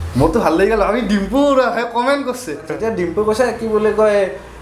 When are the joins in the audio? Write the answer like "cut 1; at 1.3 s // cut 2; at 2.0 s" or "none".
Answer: cut 1; at 2.7 s